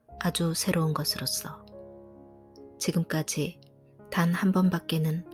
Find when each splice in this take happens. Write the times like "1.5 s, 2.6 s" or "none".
none